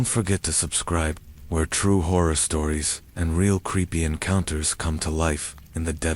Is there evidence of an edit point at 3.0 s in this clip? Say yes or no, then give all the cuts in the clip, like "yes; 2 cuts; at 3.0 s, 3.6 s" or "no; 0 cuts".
no; 1 cut; at 1.2 s